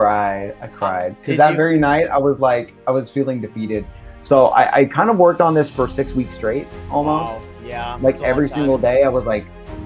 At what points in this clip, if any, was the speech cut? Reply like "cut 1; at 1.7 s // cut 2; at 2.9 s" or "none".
cut 1; at 4.0 s